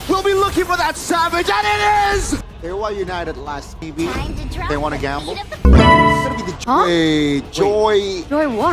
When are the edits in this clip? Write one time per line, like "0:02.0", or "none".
0:02.5
0:06.5